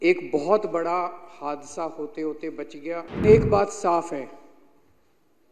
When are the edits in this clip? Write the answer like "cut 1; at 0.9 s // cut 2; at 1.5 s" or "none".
cut 1; at 3.2 s